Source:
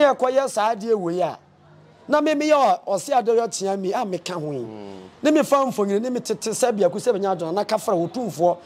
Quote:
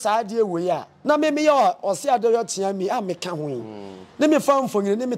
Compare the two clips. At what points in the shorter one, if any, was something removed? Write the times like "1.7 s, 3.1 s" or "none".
0.9 s